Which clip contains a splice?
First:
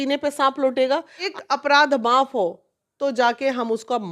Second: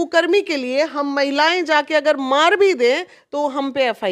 first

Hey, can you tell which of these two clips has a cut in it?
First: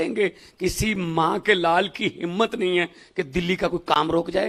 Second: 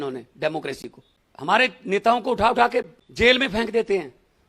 second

